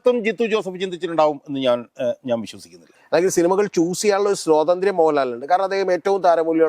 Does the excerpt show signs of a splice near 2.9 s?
yes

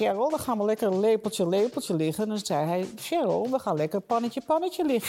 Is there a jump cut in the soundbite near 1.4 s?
no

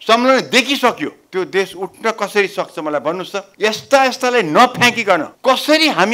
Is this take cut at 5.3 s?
yes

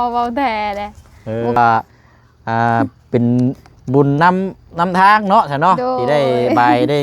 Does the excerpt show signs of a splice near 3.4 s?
no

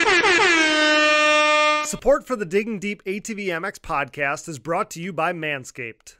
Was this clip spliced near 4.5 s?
no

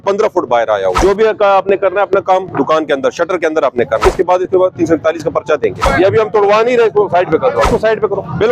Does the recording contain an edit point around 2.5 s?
no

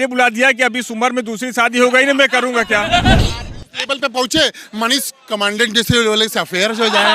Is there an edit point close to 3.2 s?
yes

